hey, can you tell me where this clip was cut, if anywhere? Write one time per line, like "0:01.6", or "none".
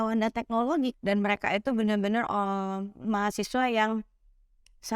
0:00.9